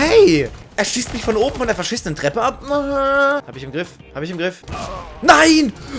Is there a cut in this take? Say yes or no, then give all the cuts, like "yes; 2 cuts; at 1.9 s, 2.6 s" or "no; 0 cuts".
yes; 1 cut; at 3.6 s